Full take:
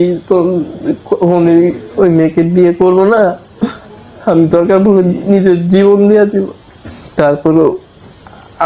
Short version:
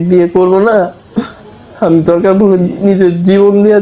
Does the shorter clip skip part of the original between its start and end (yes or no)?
no